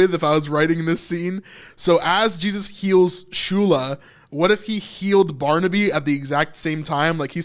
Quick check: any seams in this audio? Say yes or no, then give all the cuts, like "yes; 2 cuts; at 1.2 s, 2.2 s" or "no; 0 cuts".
no; 0 cuts